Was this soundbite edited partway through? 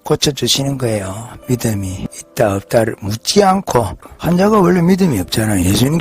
yes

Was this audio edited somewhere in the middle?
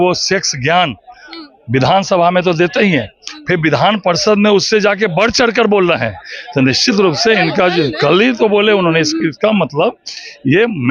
no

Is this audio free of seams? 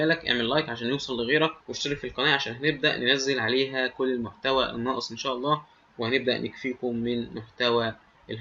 no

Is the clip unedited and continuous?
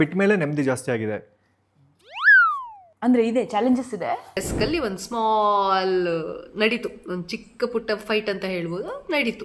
no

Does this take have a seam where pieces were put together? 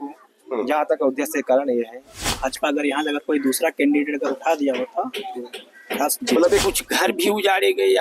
yes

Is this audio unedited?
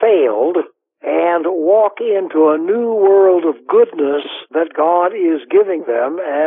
no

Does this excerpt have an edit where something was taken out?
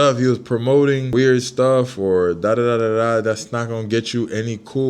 yes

